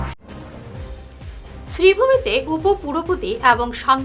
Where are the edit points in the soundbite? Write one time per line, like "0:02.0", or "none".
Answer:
none